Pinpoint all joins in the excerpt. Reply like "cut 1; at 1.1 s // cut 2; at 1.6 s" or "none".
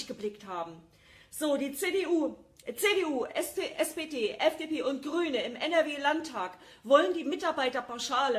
cut 1; at 4.6 s